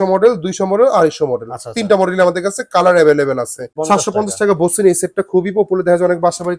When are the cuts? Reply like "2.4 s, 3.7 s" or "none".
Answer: 3.7 s